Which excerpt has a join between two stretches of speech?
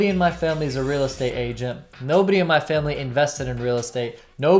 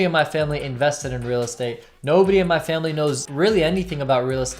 second; 1 cut; at 3.2 s

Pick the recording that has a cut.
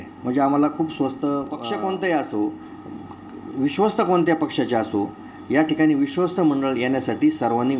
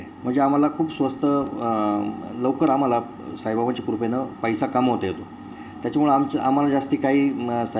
first; 1 cut; at 1.6 s

